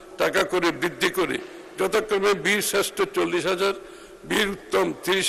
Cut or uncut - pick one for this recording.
uncut